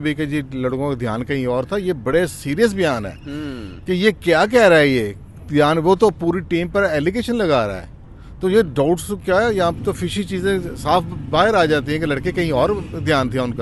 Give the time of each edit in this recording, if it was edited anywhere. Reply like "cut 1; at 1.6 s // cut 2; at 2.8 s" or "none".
none